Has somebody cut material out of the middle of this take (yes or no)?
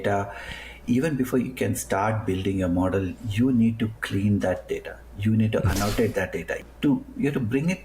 yes